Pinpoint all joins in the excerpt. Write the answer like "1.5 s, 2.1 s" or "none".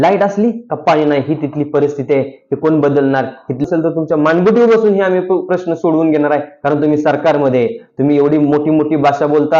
3.6 s